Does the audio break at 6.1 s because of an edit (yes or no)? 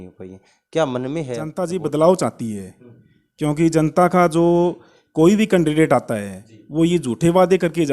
no